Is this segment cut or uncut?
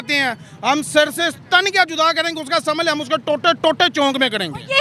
uncut